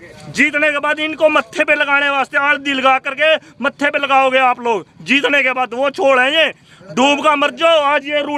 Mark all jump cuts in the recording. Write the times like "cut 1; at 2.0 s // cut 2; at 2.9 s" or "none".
none